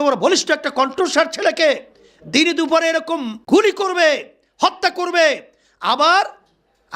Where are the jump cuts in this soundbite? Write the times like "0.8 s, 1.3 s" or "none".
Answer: 3.3 s